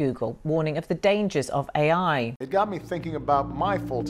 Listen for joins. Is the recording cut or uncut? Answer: cut